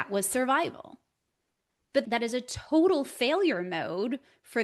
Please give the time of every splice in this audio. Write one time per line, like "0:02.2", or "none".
0:02.0